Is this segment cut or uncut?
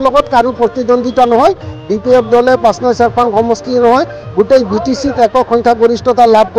uncut